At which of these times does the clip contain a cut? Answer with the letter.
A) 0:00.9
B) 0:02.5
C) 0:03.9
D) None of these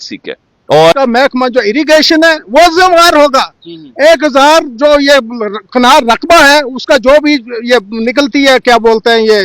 A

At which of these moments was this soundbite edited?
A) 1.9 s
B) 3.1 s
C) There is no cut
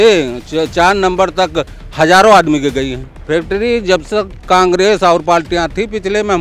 B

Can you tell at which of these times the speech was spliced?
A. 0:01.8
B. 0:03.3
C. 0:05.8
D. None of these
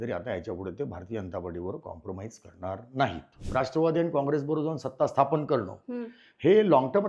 B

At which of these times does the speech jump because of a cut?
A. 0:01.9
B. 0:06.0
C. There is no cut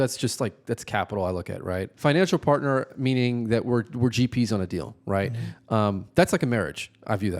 A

